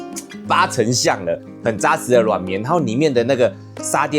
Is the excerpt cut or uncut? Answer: cut